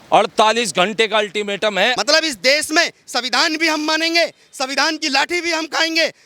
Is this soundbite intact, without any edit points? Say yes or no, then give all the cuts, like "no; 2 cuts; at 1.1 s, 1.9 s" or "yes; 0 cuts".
no; 1 cut; at 2.0 s